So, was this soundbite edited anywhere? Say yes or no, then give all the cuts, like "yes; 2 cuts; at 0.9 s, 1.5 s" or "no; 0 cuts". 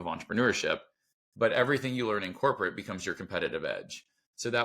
no; 0 cuts